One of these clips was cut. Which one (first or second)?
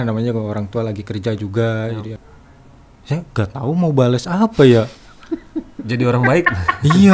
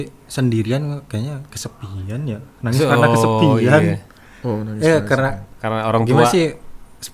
first